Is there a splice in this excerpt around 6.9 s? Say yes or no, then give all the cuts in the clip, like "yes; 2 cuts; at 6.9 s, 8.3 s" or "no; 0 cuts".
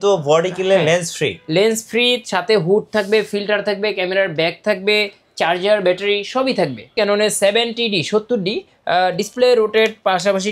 yes; 1 cut; at 6.9 s